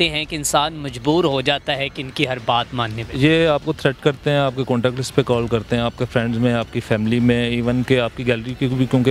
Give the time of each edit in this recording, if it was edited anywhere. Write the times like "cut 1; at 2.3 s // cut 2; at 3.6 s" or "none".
none